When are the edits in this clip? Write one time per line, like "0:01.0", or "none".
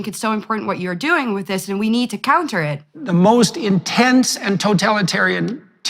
0:03.0